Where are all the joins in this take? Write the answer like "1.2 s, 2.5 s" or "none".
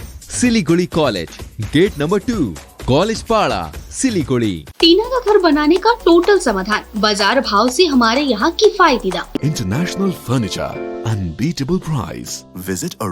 4.7 s, 9.4 s